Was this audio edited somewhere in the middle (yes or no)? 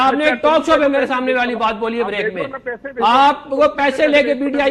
no